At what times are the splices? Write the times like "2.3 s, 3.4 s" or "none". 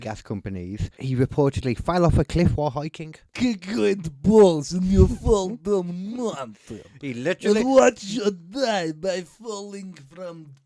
0.9 s, 3.2 s